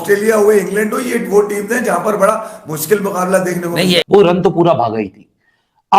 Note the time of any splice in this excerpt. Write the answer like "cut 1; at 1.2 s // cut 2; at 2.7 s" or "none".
cut 1; at 3.9 s